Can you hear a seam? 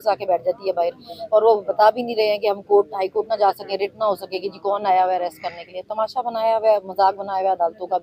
no; 0 cuts

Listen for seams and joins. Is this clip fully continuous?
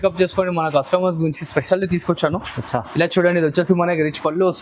yes; 0 cuts

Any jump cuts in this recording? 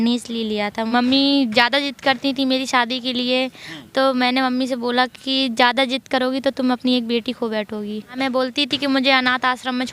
yes; 2 cuts; at 0.9 s, 8.2 s

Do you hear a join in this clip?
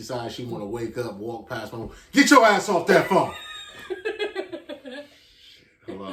no; 0 cuts

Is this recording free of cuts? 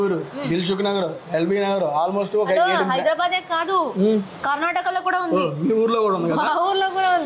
yes; 0 cuts

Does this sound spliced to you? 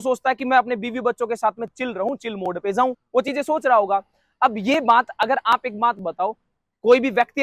no; 0 cuts

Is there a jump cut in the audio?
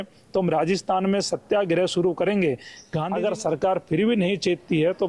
yes; 1 cut; at 2.7 s

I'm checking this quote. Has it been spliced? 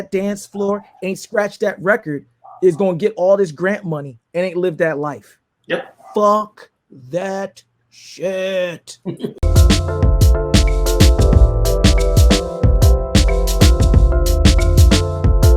yes; 1 cut; at 9.6 s

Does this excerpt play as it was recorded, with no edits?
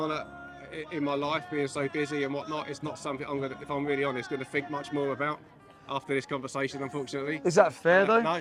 yes; 0 cuts

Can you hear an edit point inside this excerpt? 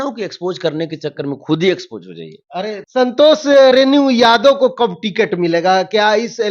yes; 1 cut; at 2.8 s

